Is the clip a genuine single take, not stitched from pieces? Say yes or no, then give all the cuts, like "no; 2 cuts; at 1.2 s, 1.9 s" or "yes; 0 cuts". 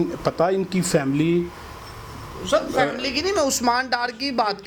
yes; 0 cuts